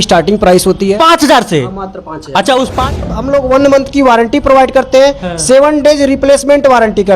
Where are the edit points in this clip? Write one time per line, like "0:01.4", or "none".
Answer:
0:03.1